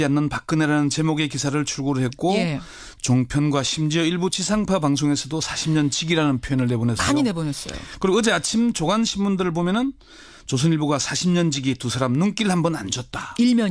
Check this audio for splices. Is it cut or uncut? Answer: cut